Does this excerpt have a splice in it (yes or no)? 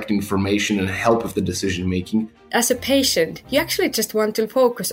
yes